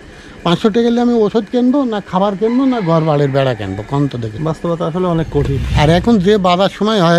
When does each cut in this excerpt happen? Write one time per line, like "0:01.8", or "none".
0:04.3
0:05.6